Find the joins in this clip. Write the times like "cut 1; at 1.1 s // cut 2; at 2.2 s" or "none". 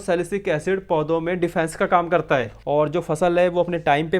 cut 1; at 2.6 s